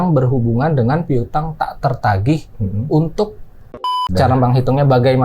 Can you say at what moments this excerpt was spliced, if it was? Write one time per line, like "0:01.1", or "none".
0:03.8